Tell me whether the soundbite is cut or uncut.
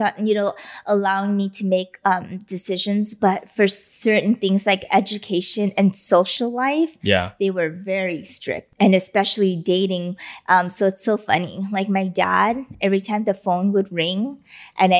cut